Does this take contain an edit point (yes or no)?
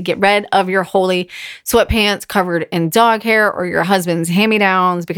no